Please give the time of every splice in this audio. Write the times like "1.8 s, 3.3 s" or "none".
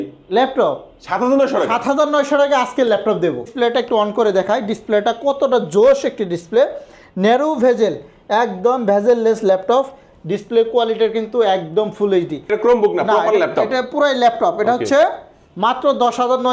3.5 s, 12.5 s